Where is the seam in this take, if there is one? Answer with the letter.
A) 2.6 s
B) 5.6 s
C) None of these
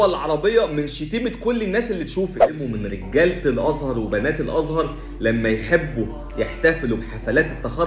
A